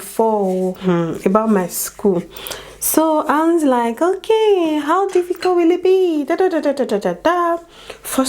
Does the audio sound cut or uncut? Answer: uncut